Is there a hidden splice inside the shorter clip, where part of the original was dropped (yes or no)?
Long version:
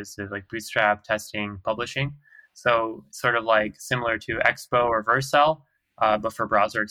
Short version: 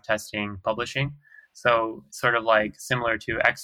no